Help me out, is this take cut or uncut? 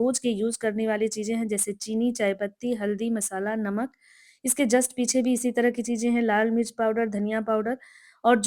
uncut